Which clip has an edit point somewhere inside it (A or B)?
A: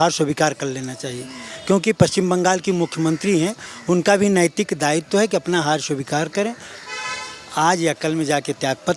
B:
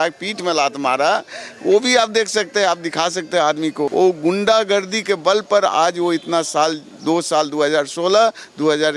B